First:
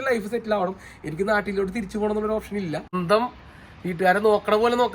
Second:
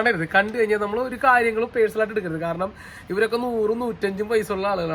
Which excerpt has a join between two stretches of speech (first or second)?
first